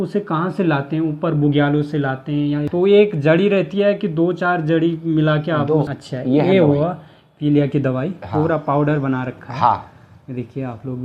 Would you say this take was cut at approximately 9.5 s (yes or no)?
no